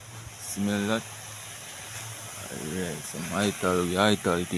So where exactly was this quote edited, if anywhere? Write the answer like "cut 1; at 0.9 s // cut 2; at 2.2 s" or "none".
none